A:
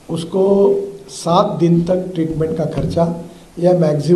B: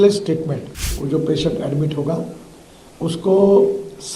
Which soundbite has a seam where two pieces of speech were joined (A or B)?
B